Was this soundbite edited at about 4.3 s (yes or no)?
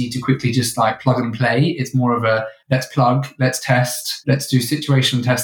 no